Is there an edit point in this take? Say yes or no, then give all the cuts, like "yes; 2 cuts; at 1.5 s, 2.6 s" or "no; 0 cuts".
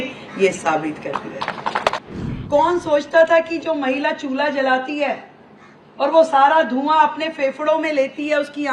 yes; 1 cut; at 2.0 s